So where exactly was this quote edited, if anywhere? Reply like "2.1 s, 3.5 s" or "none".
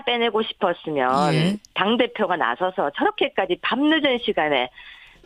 1.2 s